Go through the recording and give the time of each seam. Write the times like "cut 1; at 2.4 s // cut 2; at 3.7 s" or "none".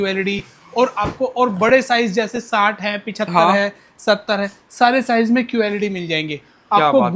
none